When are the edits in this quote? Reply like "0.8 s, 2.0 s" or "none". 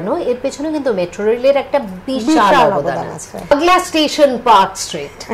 3.5 s